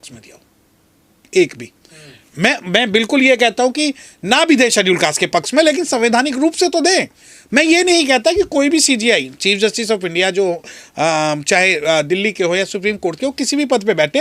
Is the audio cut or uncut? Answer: uncut